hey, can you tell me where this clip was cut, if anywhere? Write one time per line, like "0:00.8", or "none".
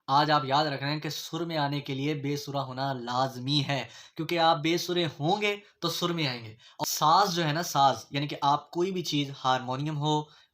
0:06.8